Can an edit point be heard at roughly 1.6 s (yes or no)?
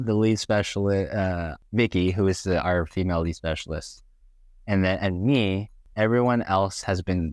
yes